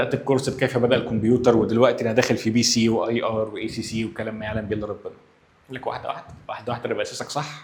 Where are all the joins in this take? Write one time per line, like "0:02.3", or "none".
none

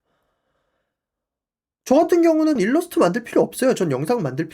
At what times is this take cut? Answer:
0:02.6

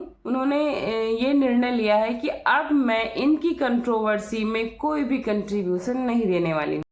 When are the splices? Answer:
none

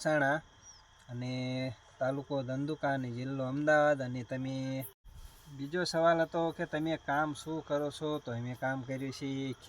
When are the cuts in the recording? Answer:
0:05.0

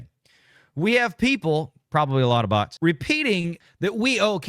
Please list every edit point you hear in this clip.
0:02.7
0:03.6

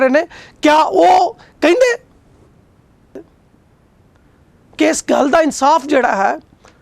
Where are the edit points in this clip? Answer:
0:03.1

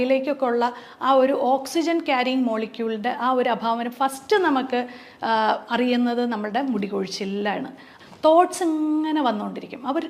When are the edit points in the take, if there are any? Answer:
0:07.8

